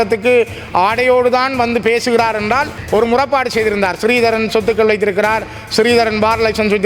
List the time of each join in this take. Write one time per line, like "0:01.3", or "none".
0:02.8